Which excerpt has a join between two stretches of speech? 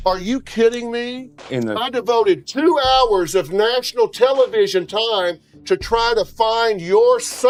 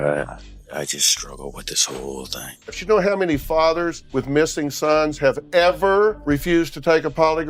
second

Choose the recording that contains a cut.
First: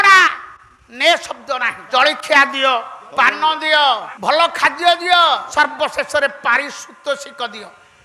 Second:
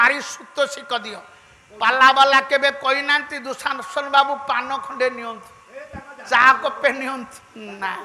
first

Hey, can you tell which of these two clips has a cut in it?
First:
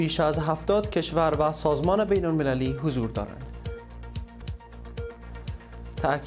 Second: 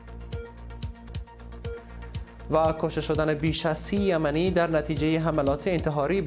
second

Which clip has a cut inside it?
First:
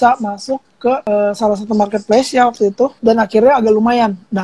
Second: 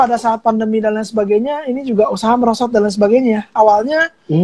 first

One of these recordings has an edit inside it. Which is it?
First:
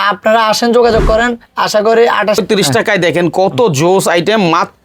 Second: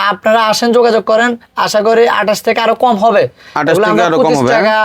first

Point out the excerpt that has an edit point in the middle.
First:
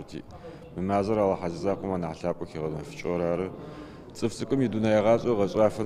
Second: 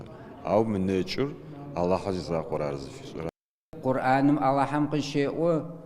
second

